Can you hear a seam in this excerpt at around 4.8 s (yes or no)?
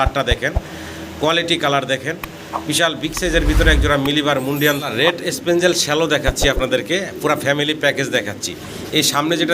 yes